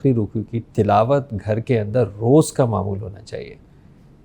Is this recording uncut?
yes; 0 cuts

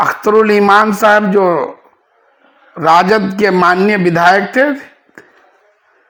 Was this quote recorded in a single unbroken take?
yes; 0 cuts

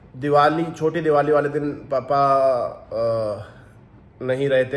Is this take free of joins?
yes; 0 cuts

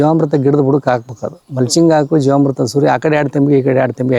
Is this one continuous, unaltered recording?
yes; 0 cuts

